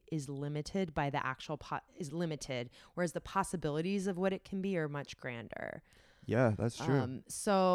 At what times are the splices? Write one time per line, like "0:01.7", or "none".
none